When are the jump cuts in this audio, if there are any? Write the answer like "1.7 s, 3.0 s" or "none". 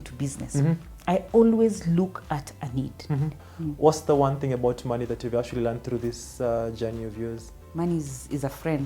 3.4 s, 7.5 s